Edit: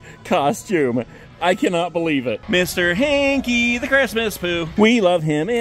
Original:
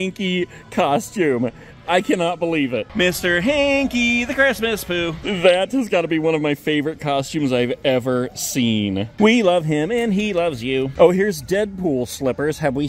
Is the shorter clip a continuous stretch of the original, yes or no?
no